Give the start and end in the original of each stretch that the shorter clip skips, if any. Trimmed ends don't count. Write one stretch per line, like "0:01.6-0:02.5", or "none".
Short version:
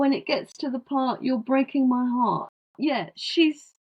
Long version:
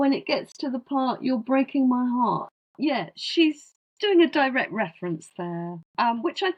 none

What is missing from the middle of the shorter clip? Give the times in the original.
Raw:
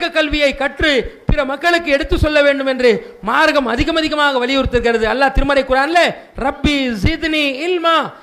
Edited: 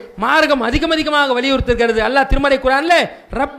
none

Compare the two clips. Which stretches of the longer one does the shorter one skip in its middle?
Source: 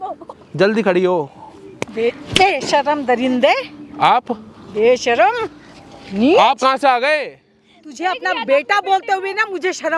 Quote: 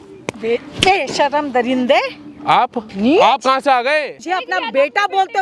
0:04.4-0:06.0
0:07.3-0:07.9

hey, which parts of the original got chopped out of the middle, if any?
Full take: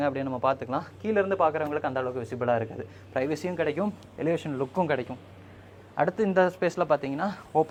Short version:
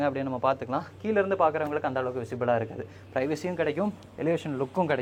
none

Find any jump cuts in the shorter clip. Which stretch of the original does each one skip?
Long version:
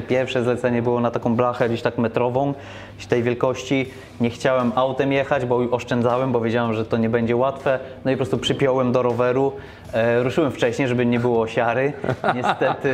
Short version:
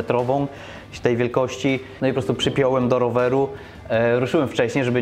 0:04.0-0:07.9

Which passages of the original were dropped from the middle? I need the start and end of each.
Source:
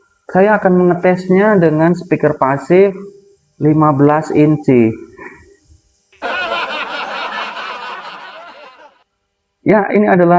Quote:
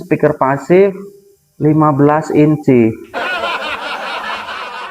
0:05.0-0:06.1

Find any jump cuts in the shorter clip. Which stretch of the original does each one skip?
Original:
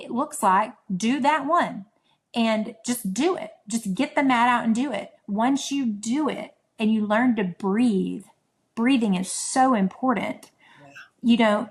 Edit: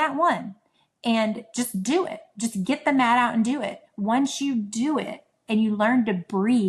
none

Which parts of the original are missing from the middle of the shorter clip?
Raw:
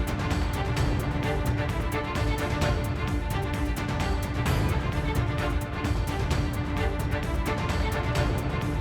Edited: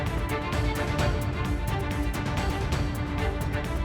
0:04.1-0:06.1

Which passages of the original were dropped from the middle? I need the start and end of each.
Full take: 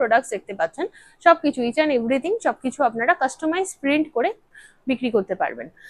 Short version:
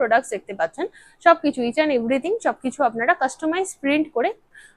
none

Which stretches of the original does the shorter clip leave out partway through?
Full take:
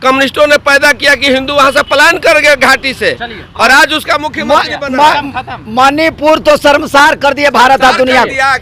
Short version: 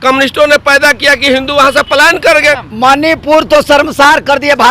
0:02.6-0:05.5

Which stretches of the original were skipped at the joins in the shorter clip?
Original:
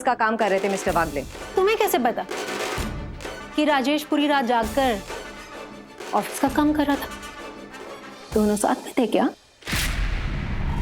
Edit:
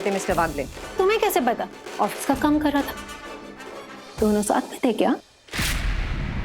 0:02.3-0:05.9

